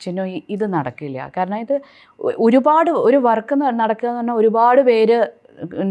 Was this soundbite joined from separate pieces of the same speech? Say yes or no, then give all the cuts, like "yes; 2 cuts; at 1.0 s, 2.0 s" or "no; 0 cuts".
no; 0 cuts